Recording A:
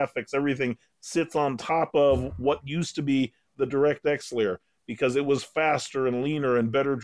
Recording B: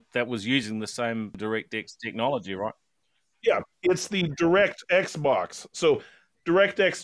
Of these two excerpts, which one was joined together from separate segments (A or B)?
B